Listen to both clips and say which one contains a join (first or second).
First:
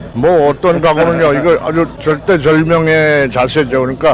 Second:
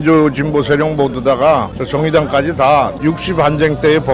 second